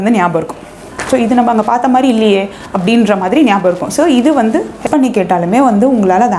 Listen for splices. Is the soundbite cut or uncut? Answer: cut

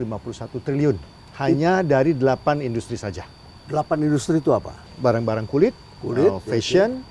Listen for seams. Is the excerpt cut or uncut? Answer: uncut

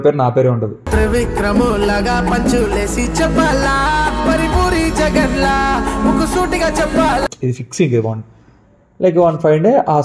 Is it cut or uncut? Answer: uncut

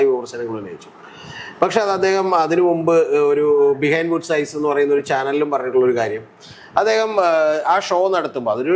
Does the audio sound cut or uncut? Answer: uncut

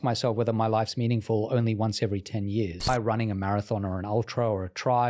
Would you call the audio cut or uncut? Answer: cut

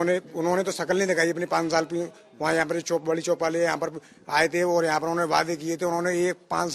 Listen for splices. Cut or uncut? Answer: uncut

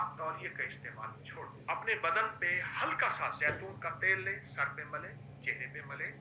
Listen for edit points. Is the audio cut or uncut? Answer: cut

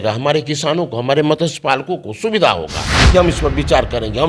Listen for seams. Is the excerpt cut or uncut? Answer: cut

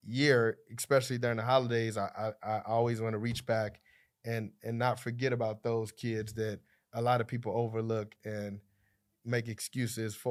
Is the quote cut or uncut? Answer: uncut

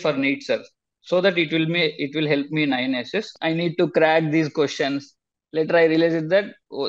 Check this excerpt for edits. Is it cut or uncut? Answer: cut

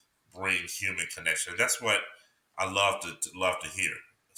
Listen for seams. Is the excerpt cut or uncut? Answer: uncut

